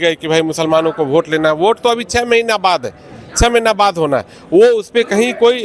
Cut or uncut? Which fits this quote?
uncut